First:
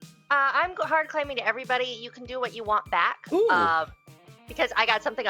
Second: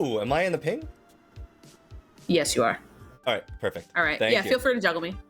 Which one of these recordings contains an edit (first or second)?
second